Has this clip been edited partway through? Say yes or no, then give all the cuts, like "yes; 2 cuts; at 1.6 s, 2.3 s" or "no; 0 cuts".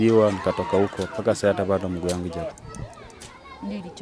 yes; 1 cut; at 2.5 s